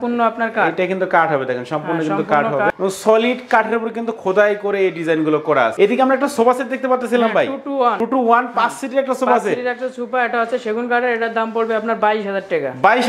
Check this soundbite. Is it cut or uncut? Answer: uncut